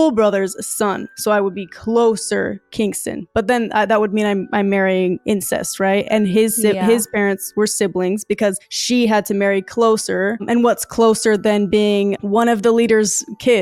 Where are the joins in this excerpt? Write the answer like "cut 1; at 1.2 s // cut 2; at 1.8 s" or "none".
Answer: none